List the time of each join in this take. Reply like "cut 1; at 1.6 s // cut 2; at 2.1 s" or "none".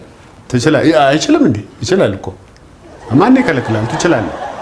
none

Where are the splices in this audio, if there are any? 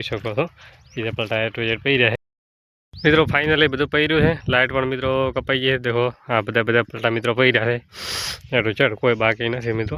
cut 1; at 2.1 s

